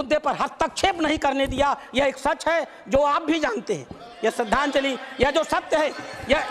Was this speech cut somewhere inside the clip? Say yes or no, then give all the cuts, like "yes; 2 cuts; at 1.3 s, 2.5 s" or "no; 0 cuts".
no; 0 cuts